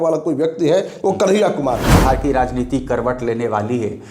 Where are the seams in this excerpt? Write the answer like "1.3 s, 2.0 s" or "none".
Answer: 1.9 s